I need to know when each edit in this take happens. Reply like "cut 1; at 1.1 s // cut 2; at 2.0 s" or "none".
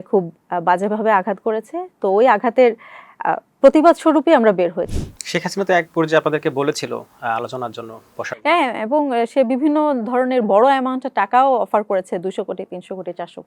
cut 1; at 4.9 s